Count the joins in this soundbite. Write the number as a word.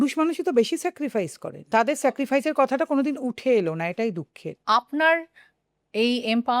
two